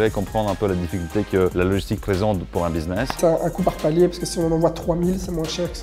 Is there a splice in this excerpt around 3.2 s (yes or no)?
yes